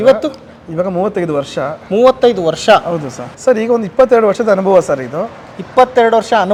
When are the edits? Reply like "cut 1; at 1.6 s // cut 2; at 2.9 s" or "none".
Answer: none